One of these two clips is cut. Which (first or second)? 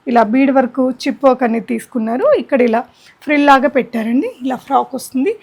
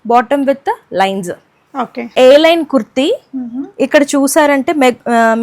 second